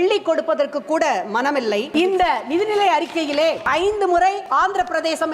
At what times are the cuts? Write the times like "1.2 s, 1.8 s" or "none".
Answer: 1.9 s, 3.6 s, 4.4 s